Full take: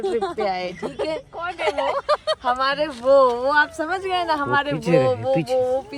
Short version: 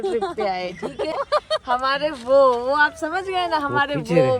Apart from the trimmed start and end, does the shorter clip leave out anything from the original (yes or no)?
yes